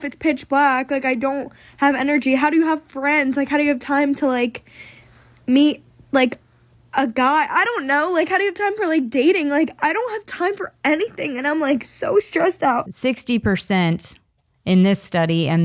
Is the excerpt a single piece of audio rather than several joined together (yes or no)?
no